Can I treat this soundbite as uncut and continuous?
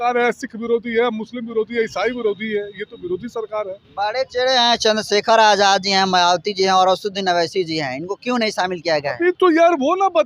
yes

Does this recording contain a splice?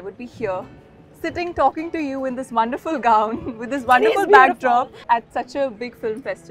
yes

